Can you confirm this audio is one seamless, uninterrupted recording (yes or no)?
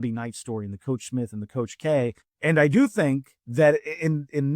no